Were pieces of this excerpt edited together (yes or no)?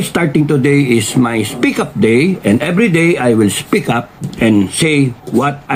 no